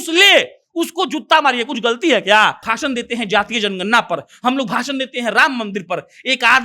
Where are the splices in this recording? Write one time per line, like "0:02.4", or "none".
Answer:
0:02.7